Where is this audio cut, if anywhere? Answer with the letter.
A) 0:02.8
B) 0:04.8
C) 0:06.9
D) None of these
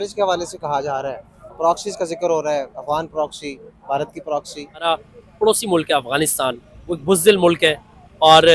B